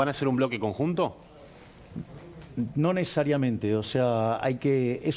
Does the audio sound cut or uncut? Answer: uncut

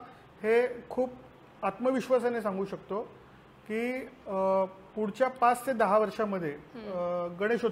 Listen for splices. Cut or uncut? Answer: uncut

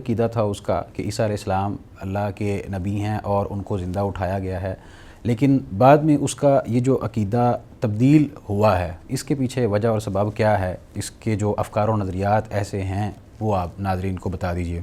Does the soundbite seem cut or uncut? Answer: uncut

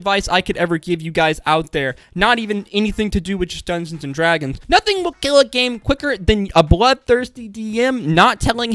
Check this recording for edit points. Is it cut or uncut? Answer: cut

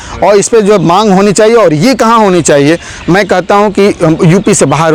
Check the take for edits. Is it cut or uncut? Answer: uncut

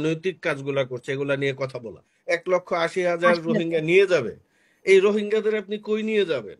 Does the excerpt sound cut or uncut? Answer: cut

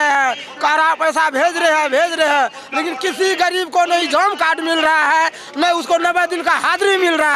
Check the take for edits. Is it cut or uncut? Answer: uncut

